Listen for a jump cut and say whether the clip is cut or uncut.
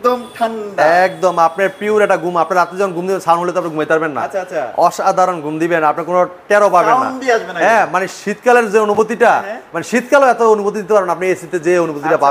uncut